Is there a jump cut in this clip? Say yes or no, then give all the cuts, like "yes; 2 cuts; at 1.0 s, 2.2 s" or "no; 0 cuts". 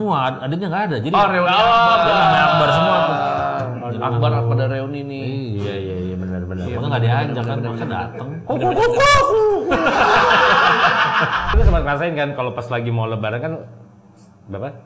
yes; 1 cut; at 11.5 s